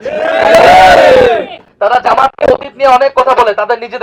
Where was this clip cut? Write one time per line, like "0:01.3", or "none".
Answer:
0:01.6